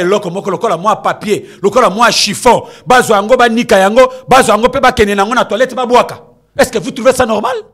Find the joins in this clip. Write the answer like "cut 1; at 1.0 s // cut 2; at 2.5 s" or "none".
none